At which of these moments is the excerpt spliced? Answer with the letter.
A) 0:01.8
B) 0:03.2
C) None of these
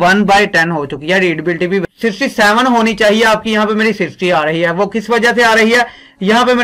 A